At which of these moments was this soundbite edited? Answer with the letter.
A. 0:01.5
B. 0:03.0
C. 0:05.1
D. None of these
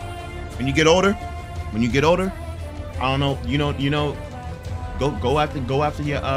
D